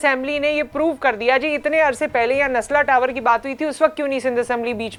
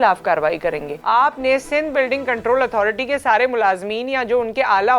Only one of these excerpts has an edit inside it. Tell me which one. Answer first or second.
second